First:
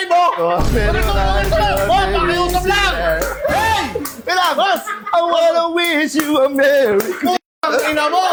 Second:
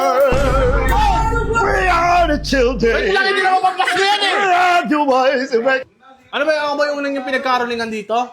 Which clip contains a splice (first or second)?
second